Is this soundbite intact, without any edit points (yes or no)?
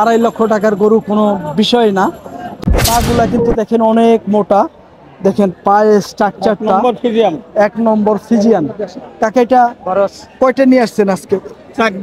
no